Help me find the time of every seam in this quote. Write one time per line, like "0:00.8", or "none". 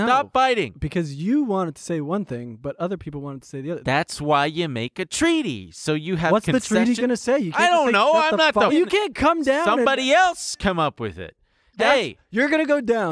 0:08.7